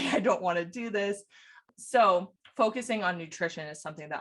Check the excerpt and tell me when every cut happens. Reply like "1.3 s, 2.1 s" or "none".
1.6 s, 2.4 s